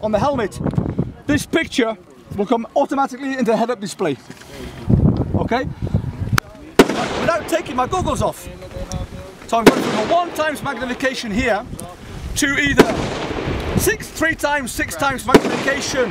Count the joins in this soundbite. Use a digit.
1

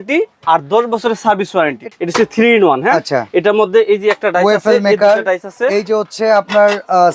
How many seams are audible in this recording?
1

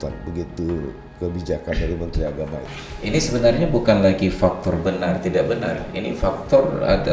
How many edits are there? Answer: 1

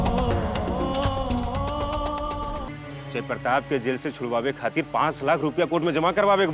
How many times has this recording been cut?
1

